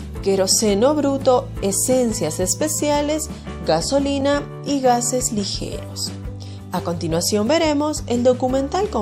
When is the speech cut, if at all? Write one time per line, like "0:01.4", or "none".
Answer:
none